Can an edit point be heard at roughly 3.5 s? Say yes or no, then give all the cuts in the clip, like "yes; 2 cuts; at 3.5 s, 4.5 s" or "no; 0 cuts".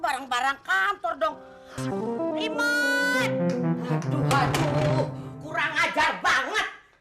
yes; 1 cut; at 3.5 s